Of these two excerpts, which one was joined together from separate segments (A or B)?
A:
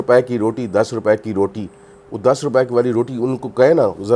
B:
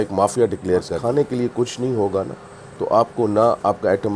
B